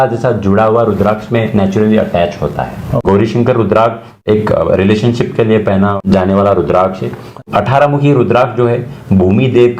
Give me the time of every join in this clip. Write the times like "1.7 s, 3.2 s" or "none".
2.9 s, 4.2 s, 6.0 s, 7.4 s